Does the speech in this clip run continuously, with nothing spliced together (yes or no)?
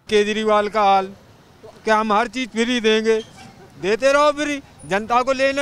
yes